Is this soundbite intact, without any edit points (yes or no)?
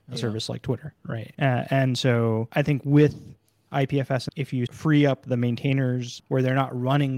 no